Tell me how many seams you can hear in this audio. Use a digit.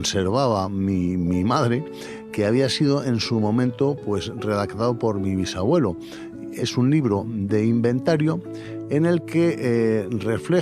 2